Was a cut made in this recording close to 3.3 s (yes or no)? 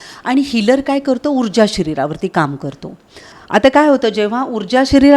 yes